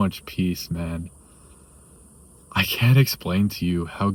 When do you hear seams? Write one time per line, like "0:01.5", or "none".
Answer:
none